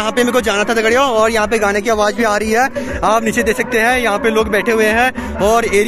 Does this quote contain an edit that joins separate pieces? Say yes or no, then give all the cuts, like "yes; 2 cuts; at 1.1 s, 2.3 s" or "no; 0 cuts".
no; 0 cuts